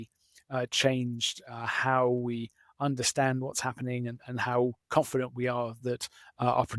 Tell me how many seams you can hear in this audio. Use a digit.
0